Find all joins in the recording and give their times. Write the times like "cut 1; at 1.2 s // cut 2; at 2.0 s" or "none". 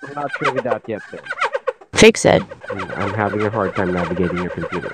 cut 1; at 2.6 s